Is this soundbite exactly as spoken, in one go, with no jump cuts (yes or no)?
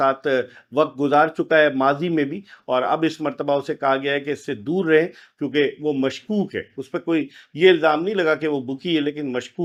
yes